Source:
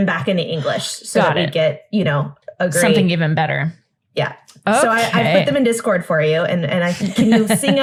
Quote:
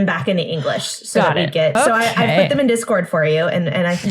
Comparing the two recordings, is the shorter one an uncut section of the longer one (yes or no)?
no